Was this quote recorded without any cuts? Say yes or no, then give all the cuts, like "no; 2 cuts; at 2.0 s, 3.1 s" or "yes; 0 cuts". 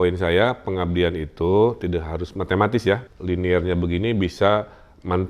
no; 1 cut; at 3.1 s